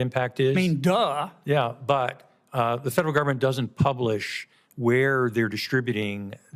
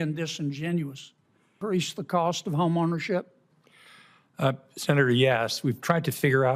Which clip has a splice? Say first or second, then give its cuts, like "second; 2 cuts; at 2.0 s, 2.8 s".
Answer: second; 1 cut; at 1.6 s